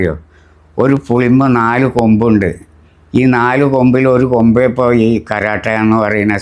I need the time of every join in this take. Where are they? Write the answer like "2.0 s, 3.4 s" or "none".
none